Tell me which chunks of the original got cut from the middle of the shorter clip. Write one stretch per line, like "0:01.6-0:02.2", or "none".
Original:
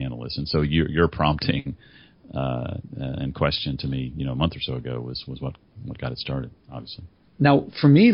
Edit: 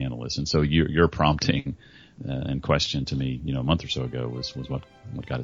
0:02.1-0:02.8